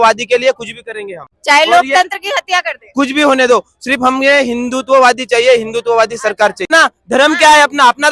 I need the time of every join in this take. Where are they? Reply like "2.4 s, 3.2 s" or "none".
6.7 s